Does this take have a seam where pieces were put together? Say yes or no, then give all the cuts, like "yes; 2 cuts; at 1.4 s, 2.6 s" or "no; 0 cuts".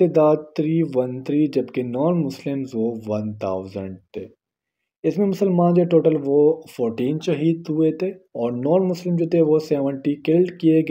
no; 0 cuts